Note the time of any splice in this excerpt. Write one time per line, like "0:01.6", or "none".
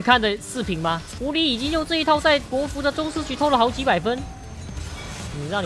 0:01.1